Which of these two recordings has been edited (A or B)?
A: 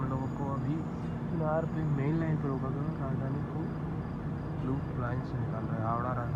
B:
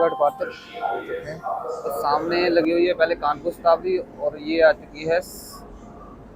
B